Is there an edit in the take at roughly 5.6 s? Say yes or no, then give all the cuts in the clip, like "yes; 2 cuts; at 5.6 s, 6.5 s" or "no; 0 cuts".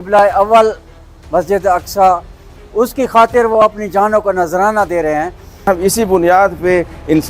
yes; 1 cut; at 5.6 s